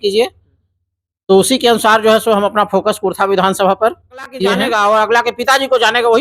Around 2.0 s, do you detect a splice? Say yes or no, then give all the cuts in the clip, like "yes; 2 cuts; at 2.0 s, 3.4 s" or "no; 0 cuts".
no; 1 cut; at 4.6 s